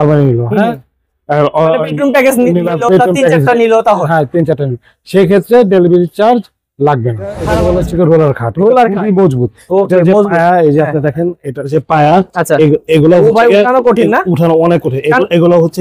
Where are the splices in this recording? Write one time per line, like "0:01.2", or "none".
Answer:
0:07.5